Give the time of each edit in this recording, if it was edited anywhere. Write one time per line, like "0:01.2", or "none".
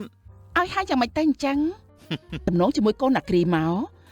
0:02.4